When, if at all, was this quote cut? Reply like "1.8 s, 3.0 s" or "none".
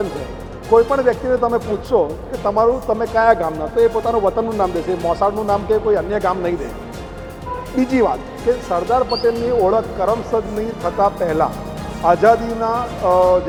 none